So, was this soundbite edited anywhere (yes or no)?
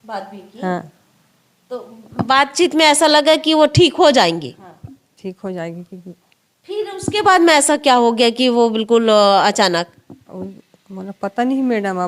no